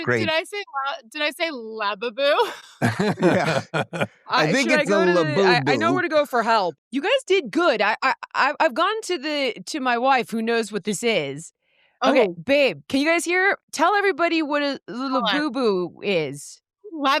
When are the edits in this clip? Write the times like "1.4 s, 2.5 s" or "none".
6.8 s